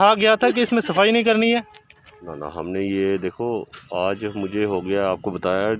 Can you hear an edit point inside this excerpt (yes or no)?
no